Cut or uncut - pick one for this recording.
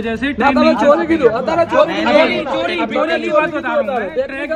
uncut